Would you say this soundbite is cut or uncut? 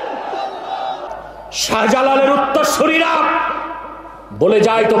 cut